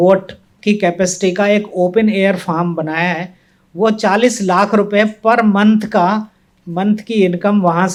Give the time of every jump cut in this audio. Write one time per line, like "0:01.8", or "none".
none